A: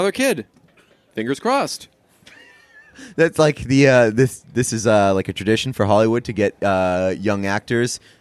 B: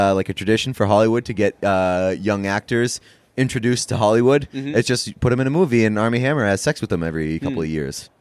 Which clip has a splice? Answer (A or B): A